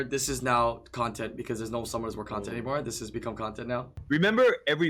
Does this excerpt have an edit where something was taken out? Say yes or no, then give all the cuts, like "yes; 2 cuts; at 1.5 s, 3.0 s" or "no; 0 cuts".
yes; 1 cut; at 3.9 s